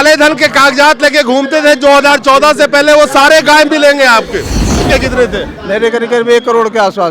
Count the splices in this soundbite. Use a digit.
1